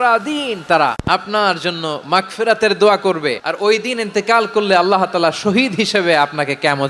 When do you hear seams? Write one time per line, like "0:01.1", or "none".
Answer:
0:01.0
0:03.5